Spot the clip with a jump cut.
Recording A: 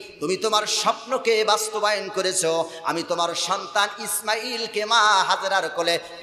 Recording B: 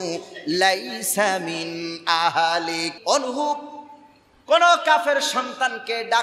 B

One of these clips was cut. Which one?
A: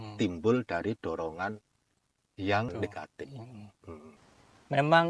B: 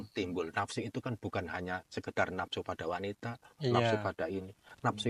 A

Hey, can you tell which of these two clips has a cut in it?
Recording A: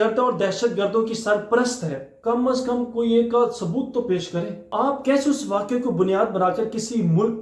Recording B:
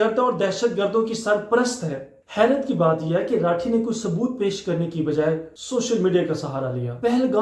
A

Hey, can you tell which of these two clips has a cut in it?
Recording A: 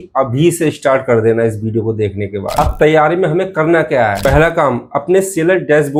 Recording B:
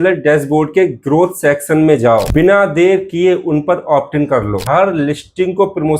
B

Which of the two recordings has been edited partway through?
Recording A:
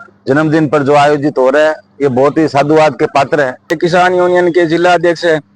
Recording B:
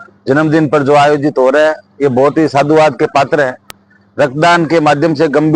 A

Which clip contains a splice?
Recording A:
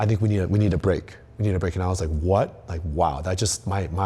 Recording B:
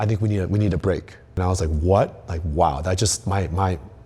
B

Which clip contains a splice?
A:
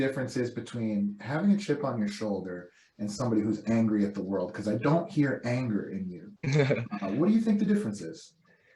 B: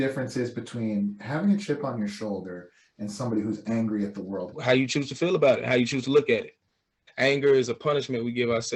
B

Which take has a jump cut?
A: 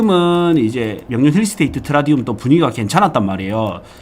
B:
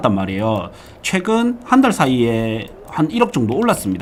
A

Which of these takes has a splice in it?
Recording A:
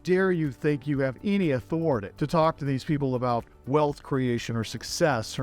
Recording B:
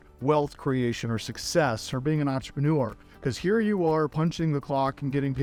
A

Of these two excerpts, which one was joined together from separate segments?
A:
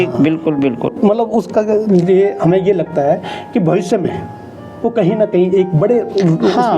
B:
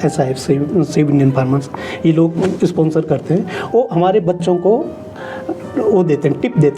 A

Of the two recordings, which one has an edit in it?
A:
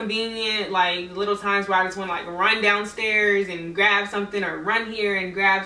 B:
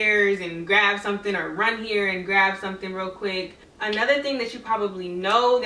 B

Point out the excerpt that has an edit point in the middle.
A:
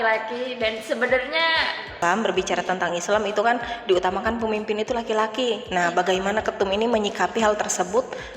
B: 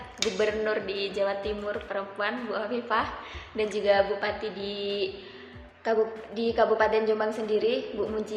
A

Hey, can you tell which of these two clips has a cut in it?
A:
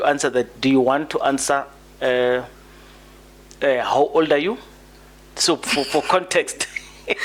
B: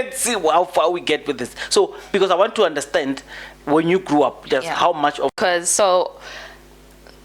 B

